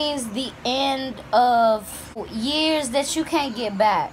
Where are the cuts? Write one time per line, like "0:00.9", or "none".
0:02.3